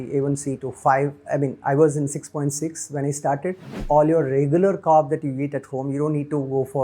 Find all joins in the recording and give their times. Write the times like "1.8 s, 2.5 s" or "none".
3.8 s